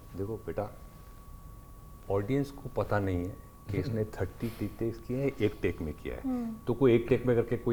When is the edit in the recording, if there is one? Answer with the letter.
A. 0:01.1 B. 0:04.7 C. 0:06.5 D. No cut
D